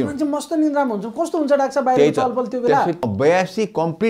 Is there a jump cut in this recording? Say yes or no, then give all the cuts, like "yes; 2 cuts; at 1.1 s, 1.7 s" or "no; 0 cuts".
yes; 1 cut; at 3.0 s